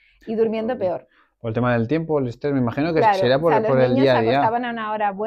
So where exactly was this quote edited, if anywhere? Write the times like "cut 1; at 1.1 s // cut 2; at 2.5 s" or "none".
none